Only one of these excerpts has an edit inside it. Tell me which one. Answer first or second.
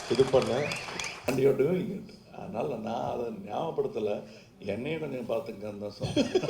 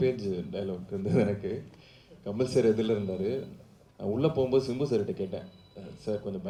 first